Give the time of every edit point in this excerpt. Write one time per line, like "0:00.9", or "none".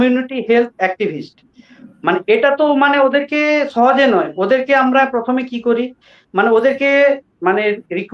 none